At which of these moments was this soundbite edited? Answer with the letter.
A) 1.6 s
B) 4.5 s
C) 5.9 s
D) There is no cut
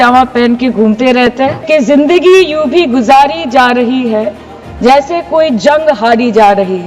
A